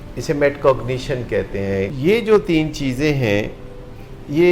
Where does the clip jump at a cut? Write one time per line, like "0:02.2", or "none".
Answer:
0:01.9